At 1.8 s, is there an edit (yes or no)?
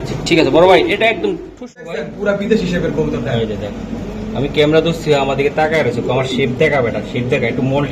yes